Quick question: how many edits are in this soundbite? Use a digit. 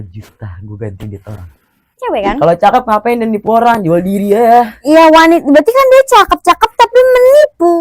1